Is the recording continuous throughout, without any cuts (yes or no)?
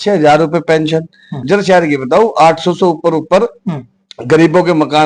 no